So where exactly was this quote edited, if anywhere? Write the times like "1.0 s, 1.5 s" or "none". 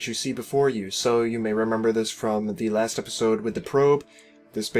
3.5 s